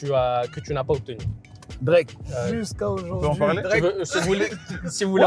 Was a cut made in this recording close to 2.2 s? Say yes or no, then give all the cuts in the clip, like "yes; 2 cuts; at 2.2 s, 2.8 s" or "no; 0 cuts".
yes; 1 cut; at 2.2 s